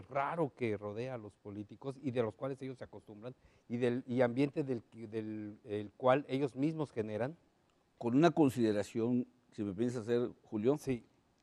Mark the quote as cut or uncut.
cut